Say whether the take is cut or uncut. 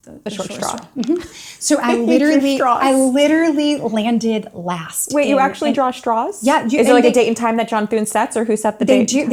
uncut